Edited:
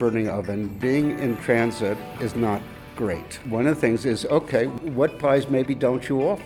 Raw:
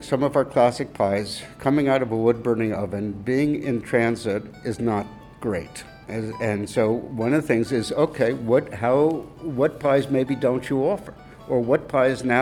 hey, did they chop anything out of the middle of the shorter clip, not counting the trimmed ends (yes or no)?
yes